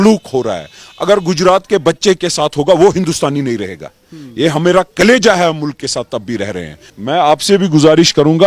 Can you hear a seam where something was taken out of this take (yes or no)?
yes